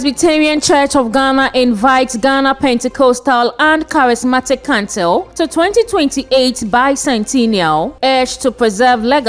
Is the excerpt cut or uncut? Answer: uncut